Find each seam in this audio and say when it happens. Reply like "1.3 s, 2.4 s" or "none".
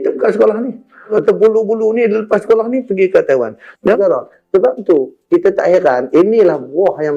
4.0 s